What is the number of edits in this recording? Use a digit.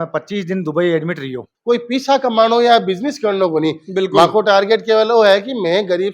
1